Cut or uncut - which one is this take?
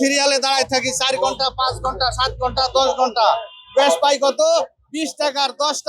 uncut